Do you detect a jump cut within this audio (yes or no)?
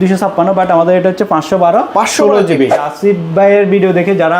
yes